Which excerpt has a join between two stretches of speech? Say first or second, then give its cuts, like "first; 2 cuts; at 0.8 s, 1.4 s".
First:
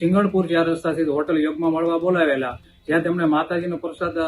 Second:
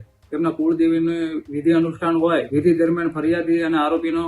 second; 1 cut; at 2.5 s